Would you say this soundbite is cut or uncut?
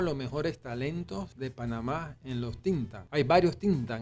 cut